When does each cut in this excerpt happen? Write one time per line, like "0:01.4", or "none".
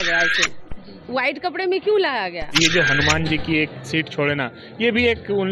0:02.6

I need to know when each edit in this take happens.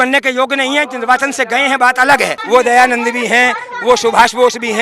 0:02.4

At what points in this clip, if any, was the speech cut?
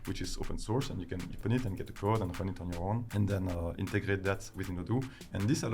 0:01.4
0:03.1

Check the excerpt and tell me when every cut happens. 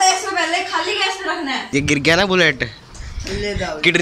0:01.6

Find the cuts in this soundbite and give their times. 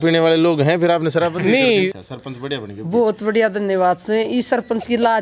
0:01.9

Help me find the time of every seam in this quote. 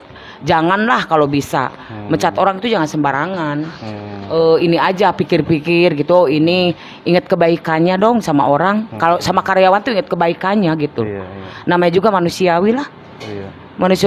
none

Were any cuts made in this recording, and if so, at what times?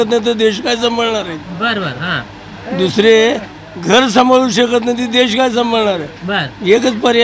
none

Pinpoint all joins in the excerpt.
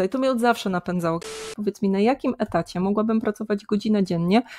0:01.3

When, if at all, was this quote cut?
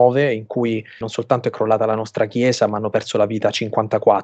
0:01.1

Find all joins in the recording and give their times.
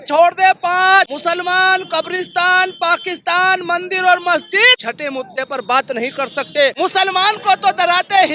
0:01.1
0:04.9
0:06.7

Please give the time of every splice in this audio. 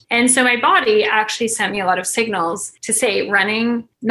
none

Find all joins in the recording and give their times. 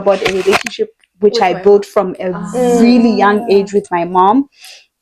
none

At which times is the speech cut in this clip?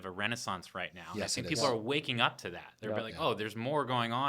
none

